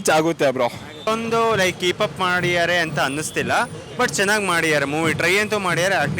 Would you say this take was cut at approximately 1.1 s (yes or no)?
yes